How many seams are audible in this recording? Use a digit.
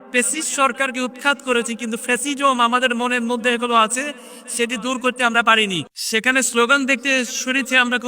1